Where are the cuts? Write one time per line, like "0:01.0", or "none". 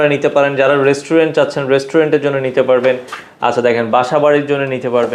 none